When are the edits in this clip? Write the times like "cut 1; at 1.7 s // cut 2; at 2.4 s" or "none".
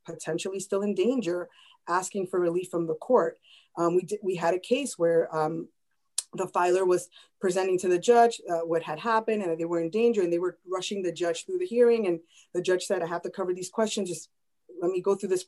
none